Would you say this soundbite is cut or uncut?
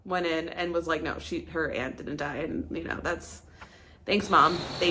uncut